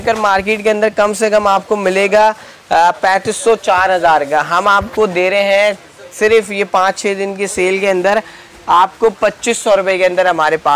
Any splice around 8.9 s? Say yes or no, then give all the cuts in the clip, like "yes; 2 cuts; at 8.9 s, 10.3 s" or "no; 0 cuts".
no; 0 cuts